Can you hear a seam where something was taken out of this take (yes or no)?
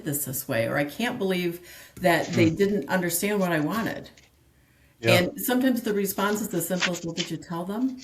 no